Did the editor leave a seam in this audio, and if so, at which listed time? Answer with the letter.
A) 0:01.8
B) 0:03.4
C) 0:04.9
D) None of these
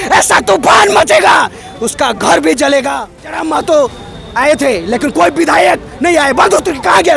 B